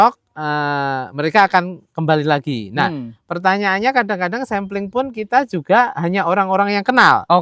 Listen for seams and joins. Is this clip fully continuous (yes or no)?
yes